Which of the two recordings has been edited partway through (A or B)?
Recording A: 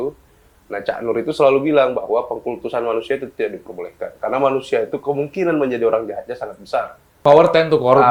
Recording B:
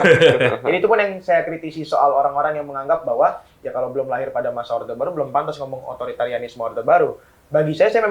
A